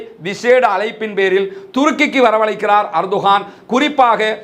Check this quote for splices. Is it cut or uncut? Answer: uncut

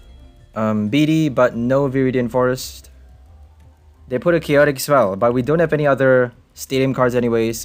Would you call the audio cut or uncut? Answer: uncut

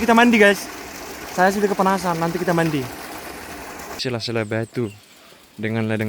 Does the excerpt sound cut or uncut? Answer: cut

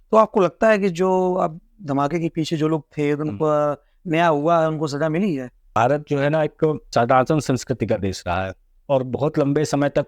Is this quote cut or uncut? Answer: cut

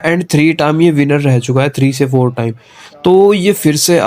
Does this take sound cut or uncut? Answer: uncut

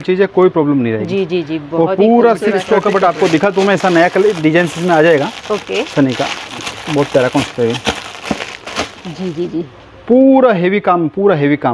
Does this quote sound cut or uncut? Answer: cut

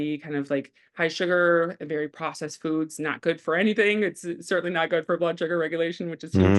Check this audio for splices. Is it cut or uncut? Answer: uncut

